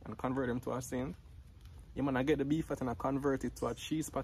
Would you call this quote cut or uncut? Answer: uncut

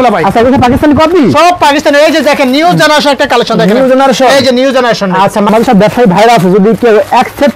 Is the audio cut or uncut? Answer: cut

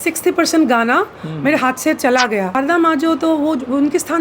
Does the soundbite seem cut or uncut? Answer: cut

